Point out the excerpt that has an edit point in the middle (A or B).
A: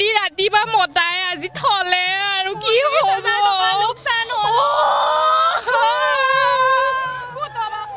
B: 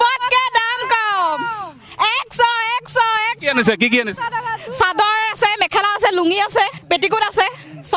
B